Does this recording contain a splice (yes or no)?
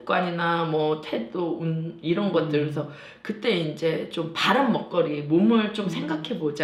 no